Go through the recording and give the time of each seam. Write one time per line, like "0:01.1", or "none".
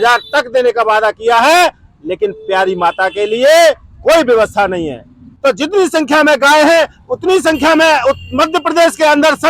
0:05.3